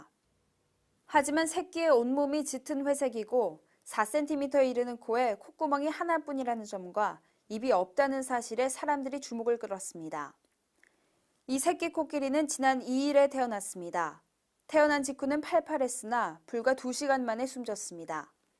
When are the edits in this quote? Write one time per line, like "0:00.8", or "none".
0:04.2